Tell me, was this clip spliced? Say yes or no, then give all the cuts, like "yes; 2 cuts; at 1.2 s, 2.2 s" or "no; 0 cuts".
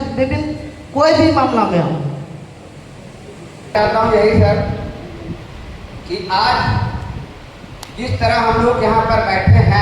yes; 1 cut; at 3.7 s